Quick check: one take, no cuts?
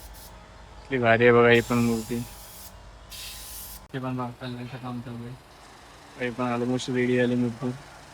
no; 1 cut; at 3.9 s

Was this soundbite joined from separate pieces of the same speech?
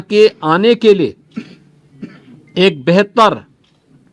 no; 0 cuts

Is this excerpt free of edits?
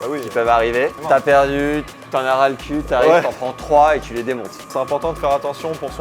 no; 2 cuts; at 1.0 s, 4.7 s

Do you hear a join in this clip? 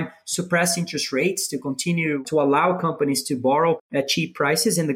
yes; 2 cuts; at 2.2 s, 3.8 s

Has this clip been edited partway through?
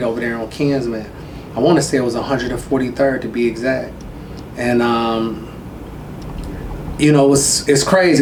no; 0 cuts

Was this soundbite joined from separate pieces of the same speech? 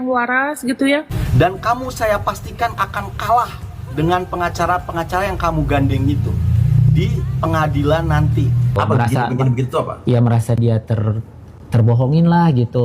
yes; 2 cuts; at 1.2 s, 8.8 s

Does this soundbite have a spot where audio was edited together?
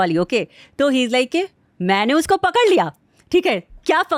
no; 0 cuts

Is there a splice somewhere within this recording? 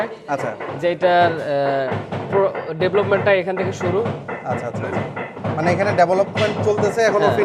no; 0 cuts

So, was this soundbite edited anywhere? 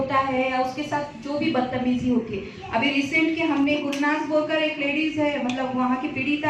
yes; 1 cut; at 3.8 s

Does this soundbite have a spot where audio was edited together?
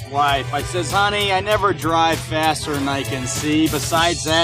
no; 0 cuts

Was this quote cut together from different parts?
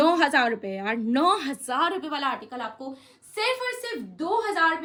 no; 0 cuts

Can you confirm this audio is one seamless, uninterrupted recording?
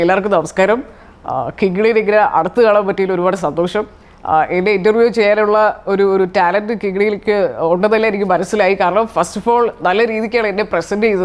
yes; 0 cuts

